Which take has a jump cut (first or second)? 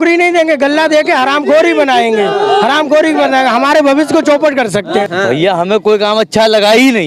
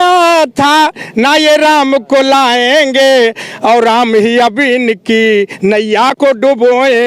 first